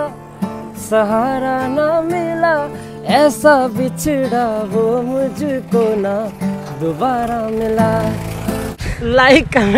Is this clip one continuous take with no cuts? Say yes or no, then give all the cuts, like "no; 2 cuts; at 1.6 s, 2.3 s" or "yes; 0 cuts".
no; 1 cut; at 8.7 s